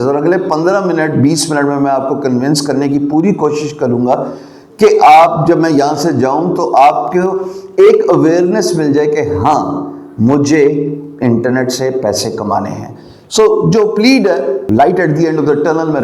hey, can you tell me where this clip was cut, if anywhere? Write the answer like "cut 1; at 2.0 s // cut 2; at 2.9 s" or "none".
cut 1; at 14.6 s

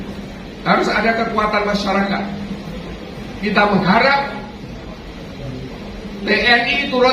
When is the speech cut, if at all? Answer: cut 1; at 4.5 s

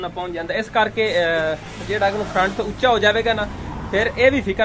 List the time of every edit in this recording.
none

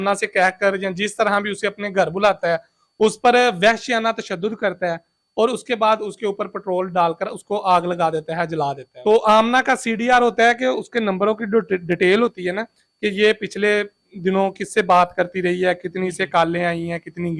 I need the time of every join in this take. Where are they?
cut 1; at 8.9 s

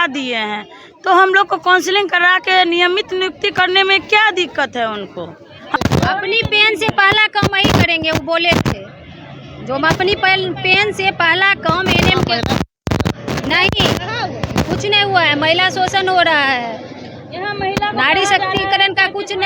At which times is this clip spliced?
cut 1; at 5.8 s

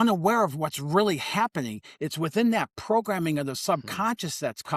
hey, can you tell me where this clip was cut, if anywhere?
none

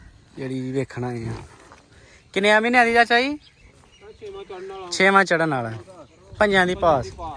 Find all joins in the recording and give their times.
none

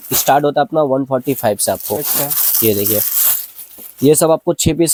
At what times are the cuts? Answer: none

